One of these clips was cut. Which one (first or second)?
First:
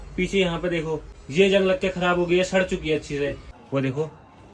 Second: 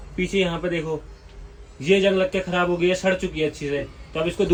first